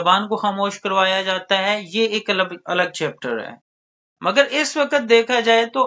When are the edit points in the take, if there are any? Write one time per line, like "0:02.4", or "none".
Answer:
none